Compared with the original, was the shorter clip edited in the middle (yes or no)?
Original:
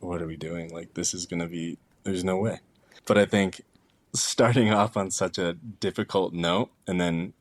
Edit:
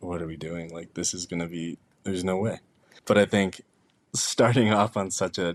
no